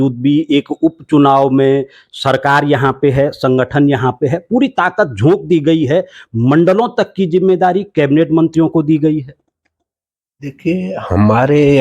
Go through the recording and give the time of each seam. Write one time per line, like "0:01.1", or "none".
none